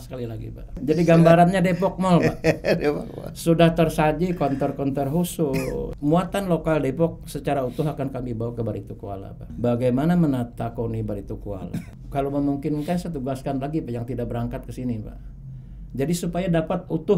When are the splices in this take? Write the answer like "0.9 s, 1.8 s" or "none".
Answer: 0.8 s, 5.9 s, 9.5 s, 12.0 s